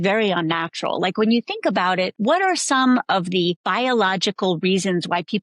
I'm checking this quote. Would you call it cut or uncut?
cut